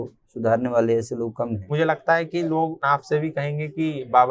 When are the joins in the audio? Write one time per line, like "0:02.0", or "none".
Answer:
0:01.7
0:02.8

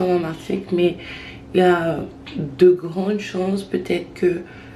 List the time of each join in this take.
none

